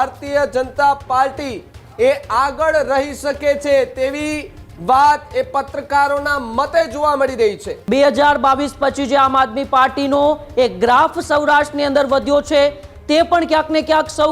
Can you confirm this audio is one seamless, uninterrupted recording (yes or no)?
no